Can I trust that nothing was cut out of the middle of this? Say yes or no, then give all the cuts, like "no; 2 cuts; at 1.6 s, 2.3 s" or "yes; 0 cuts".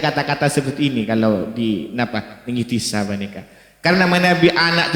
yes; 0 cuts